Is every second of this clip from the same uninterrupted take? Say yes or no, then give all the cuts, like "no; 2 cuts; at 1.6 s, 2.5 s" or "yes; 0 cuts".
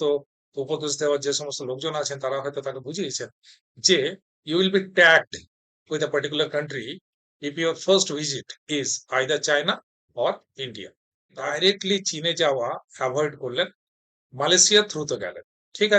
no; 1 cut; at 11.5 s